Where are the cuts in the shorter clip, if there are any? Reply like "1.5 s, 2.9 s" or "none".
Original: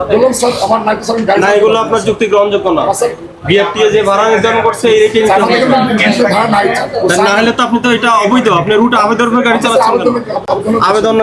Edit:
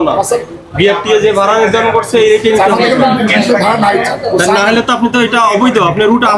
none